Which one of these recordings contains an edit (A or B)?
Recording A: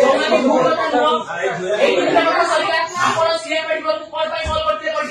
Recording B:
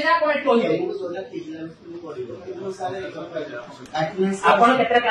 B